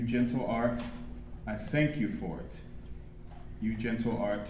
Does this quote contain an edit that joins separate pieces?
no; 0 cuts

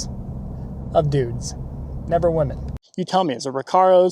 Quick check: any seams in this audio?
yes; 1 cut; at 2.7 s

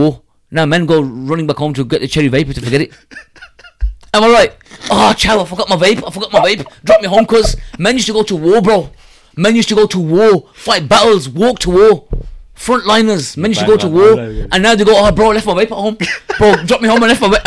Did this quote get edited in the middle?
no; 0 cuts

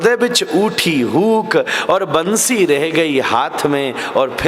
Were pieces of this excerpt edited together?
no; 0 cuts

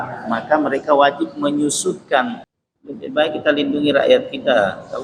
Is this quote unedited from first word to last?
no; 1 cut; at 2.5 s

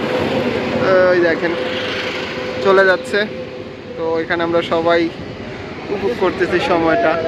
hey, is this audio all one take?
yes; 0 cuts

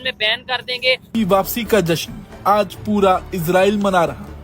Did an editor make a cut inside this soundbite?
yes; 1 cut; at 1.1 s

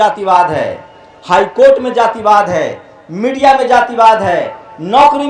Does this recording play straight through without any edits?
yes; 0 cuts

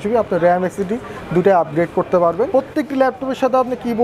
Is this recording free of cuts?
no; 1 cut; at 2.5 s

